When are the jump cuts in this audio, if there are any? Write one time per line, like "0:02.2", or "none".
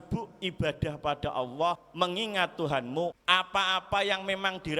0:01.9
0:03.2